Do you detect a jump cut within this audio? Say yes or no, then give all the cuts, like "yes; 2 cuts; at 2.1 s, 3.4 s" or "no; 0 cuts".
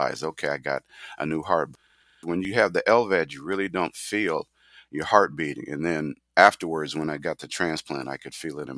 yes; 1 cut; at 1.8 s